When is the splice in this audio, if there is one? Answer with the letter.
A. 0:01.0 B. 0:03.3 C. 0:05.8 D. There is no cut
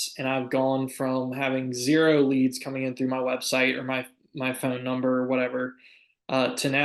D